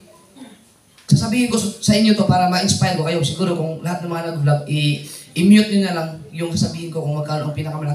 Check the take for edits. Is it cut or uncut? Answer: uncut